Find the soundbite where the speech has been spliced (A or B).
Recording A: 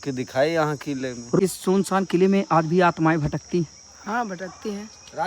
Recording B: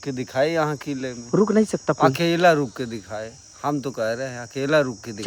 A